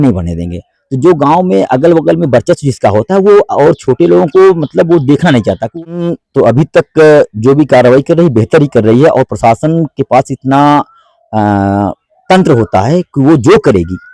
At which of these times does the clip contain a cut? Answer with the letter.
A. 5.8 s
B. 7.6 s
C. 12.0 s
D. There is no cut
A